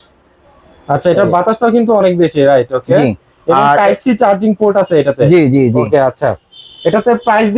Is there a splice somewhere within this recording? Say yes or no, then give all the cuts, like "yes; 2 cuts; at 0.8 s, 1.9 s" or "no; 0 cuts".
no; 0 cuts